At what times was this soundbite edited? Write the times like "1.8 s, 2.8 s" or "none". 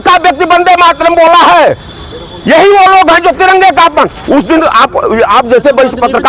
none